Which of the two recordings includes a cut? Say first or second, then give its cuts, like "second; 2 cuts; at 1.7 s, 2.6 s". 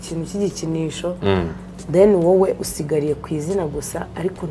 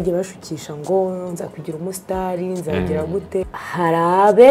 second; 1 cut; at 3.5 s